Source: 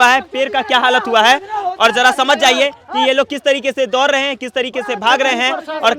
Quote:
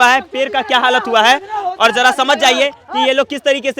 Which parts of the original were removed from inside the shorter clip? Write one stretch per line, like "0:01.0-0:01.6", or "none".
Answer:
none